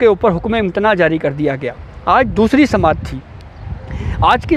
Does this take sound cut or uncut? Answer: uncut